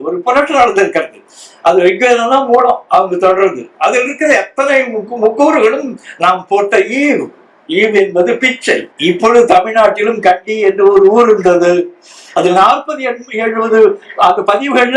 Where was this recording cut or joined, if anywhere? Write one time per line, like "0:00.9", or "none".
0:08.9

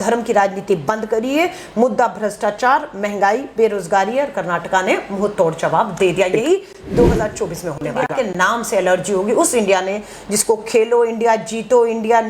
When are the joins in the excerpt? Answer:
0:08.1

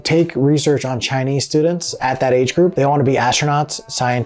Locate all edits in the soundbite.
0:02.7

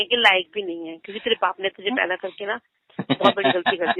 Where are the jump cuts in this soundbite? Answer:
none

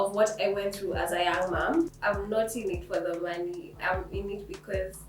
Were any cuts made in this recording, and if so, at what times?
0:02.0

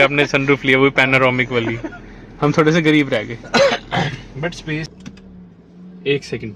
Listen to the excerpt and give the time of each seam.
none

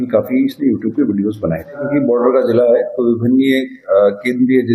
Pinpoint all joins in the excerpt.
0:01.8

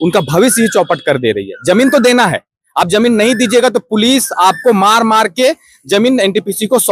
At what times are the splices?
none

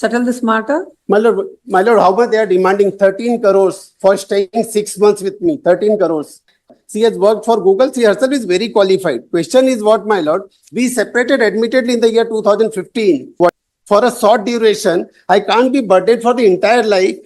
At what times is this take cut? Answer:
0:06.8
0:13.5

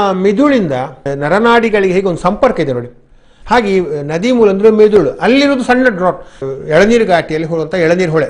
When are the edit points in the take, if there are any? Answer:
0:01.1
0:06.4

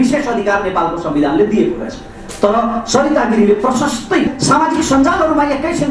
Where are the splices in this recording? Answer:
0:04.3

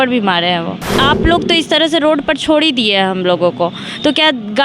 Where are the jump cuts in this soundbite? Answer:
0:00.9

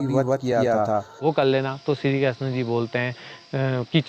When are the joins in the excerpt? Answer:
0:01.1

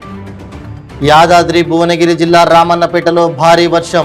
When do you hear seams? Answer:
0:01.0

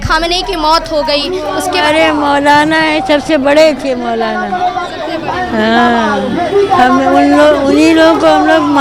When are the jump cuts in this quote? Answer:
none

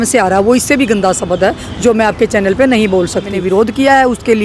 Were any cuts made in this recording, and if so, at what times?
0:03.4

